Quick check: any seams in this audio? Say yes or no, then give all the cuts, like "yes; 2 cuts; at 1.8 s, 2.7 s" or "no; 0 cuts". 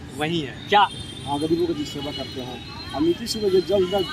yes; 1 cut; at 0.9 s